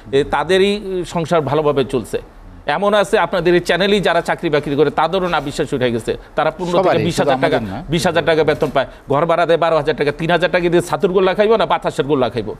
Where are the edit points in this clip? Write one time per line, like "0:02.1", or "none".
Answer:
none